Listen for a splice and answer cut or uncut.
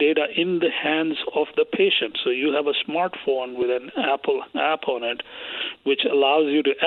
uncut